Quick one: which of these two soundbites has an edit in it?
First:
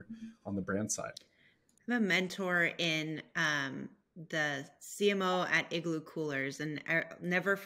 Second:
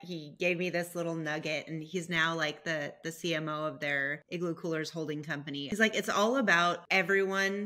second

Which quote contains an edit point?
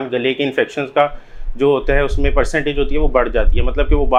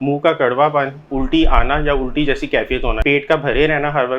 second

